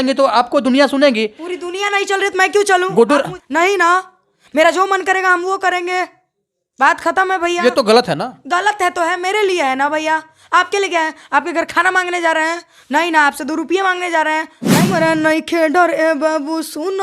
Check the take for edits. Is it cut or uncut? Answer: cut